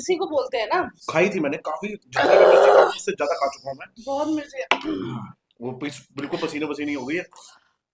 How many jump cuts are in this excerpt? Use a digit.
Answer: 1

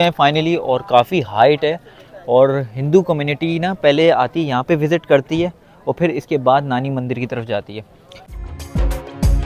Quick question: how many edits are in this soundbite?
1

